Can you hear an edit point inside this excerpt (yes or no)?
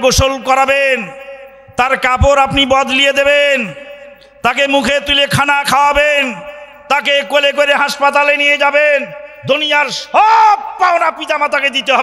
no